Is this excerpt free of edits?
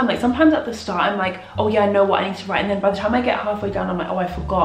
yes; 0 cuts

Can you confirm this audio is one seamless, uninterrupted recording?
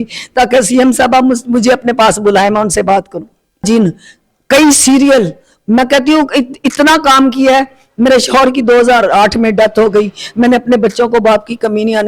no; 1 cut; at 3.6 s

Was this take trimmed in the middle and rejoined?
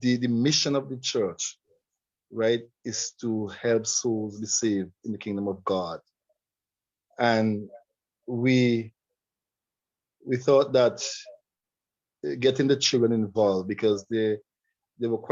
no; 0 cuts

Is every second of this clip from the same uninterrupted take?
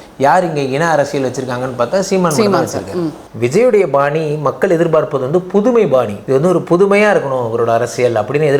no; 2 cuts; at 3.2 s, 6.2 s

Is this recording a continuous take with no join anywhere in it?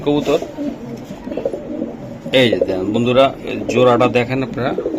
yes; 0 cuts

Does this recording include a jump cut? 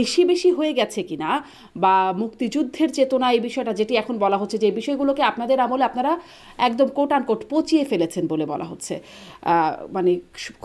no; 0 cuts

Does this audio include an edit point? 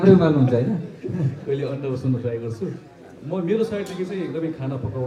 no; 0 cuts

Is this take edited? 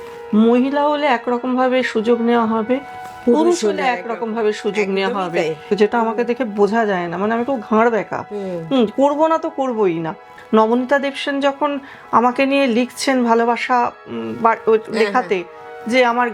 yes; 2 cuts; at 5.7 s, 10.3 s

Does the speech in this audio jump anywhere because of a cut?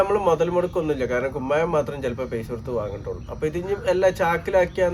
no; 0 cuts

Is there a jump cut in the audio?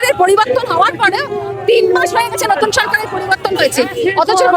no; 0 cuts

